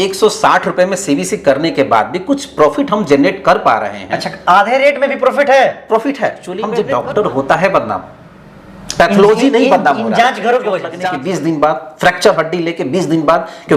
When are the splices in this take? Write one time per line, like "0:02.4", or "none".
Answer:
0:06.7
0:11.0